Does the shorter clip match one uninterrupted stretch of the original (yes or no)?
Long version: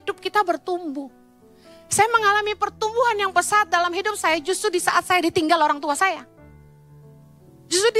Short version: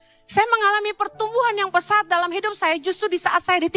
yes